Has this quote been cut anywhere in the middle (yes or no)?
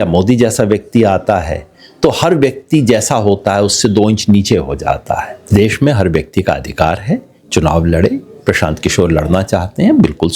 yes